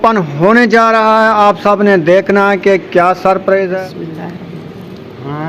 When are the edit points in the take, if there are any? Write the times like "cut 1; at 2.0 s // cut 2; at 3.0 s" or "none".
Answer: cut 1; at 3.7 s